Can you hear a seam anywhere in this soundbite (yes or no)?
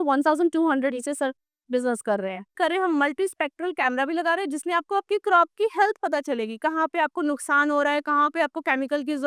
yes